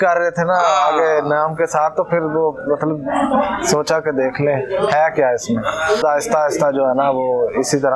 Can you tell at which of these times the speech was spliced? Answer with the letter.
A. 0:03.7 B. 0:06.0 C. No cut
B